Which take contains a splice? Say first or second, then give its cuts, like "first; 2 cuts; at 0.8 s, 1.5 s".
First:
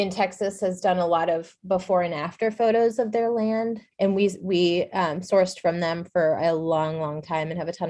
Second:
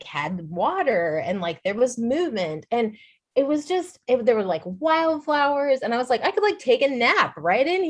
first; 1 cut; at 3.8 s